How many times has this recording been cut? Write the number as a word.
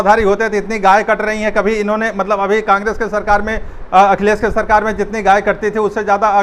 zero